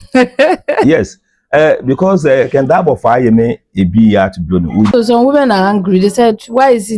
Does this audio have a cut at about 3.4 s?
no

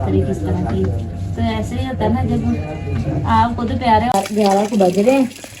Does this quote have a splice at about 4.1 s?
yes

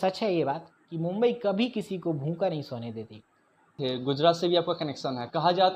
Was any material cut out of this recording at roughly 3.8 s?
yes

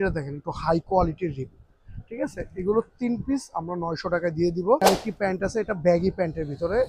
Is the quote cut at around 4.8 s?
yes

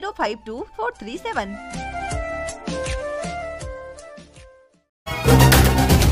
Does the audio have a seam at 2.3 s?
no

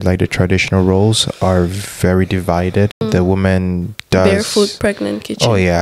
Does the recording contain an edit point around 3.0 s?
yes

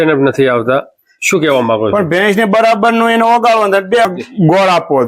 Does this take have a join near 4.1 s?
yes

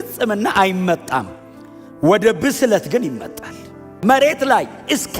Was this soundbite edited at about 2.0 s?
no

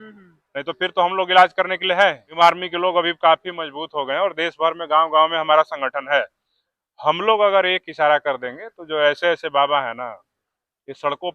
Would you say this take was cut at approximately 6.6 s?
no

